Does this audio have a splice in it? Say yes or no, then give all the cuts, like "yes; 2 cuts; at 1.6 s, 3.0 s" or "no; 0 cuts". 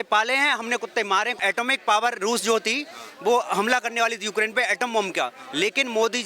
yes; 1 cut; at 1.4 s